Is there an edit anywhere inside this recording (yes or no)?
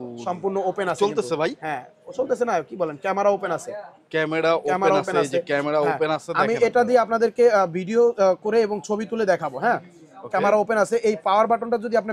no